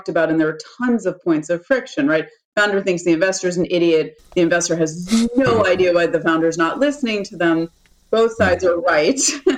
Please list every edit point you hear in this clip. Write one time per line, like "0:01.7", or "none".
none